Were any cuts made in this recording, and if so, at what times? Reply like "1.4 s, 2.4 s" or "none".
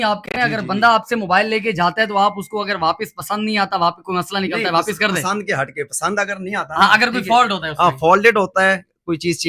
none